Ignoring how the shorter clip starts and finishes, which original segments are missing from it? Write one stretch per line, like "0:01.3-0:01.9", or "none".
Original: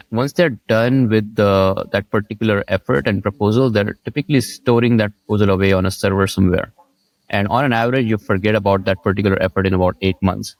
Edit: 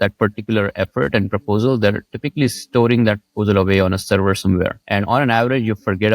0:06.7-0:07.2